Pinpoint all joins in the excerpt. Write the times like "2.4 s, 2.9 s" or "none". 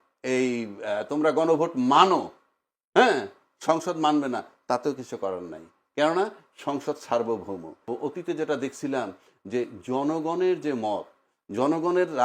7.9 s